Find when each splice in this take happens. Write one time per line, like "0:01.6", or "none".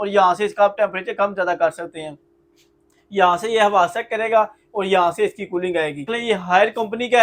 0:06.1

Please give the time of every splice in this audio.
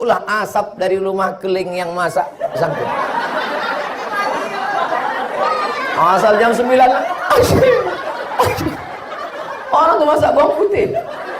none

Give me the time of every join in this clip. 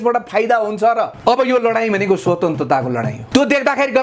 0:01.1
0:03.2

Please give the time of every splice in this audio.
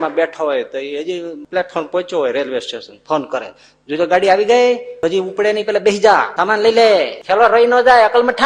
0:01.4
0:04.9
0:06.3
0:07.2

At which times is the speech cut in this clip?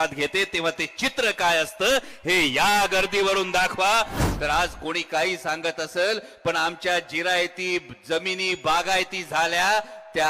0:04.2

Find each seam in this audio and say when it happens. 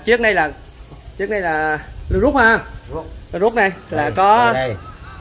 none

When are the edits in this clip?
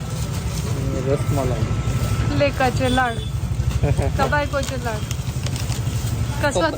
none

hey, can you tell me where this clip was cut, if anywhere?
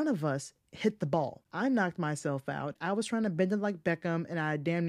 0:01.4
0:02.8

